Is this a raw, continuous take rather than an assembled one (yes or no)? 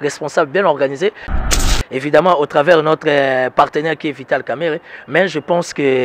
no